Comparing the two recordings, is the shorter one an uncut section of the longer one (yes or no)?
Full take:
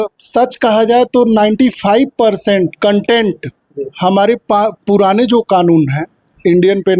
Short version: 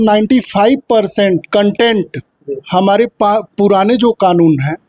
yes